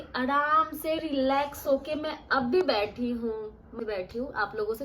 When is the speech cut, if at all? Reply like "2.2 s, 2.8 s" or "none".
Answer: 3.6 s